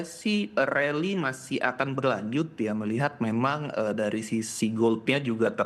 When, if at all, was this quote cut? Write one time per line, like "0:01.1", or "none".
none